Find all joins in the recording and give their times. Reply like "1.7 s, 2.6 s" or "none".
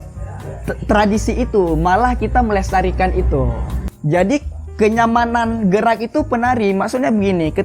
3.9 s